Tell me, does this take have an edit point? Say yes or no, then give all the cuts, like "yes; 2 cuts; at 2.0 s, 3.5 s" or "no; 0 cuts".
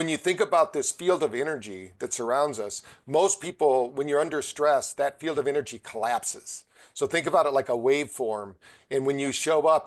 no; 0 cuts